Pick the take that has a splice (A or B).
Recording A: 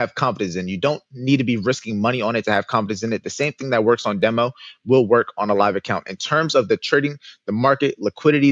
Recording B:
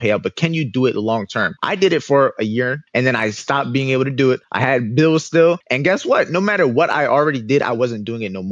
B